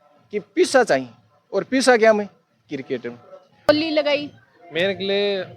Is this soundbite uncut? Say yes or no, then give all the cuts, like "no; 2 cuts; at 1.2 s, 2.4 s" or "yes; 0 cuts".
no; 1 cut; at 3.7 s